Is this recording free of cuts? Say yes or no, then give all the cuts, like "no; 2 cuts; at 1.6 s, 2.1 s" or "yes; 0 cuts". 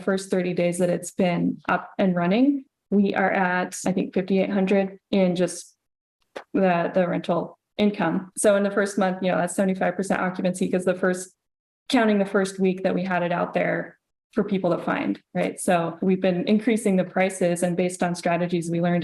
no; 3 cuts; at 3.8 s, 8.3 s, 15.9 s